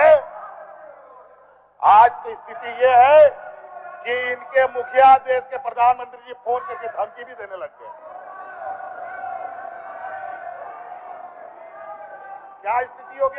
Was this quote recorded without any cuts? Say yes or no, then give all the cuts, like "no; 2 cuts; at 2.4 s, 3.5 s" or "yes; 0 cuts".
yes; 0 cuts